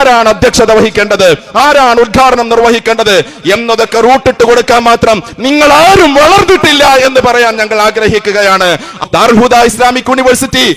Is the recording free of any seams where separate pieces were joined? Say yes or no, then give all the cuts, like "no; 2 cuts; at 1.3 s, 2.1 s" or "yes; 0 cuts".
no; 1 cut; at 9.0 s